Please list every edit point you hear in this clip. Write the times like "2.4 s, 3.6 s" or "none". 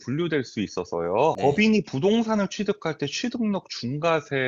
1.4 s